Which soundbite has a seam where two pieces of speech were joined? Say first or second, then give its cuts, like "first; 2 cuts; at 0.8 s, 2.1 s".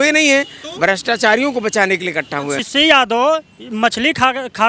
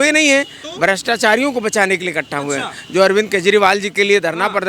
first; 1 cut; at 2.7 s